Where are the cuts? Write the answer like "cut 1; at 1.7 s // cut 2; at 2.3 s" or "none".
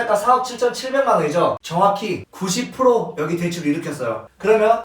cut 1; at 1.6 s